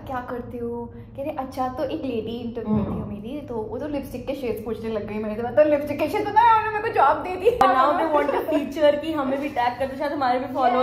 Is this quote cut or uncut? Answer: cut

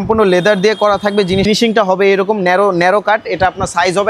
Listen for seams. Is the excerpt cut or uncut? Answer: cut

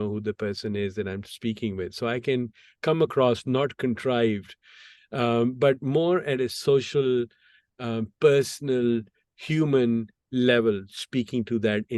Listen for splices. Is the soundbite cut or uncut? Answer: uncut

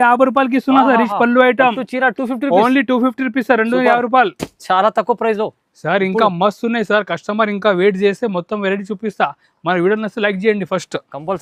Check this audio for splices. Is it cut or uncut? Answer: uncut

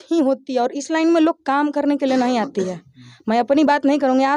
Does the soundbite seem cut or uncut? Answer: uncut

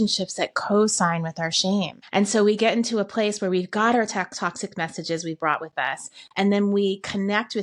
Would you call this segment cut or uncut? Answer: cut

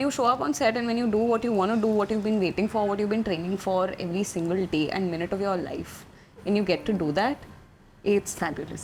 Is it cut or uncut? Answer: uncut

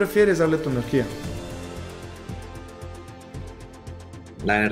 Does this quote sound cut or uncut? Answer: uncut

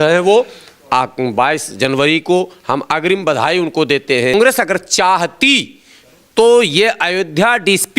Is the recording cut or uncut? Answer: cut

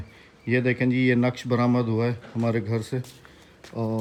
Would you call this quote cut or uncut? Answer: uncut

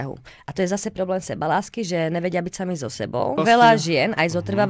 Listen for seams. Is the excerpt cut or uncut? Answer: cut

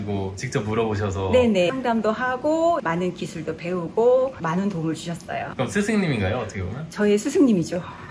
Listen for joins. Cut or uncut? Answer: uncut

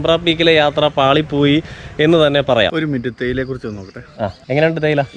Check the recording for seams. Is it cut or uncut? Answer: cut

